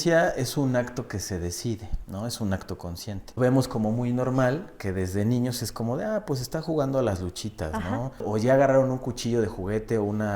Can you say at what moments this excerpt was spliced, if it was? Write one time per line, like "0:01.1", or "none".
0:03.4
0:08.2